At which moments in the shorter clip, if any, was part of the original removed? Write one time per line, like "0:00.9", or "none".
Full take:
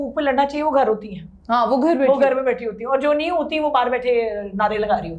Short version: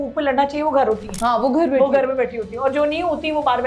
0:01.1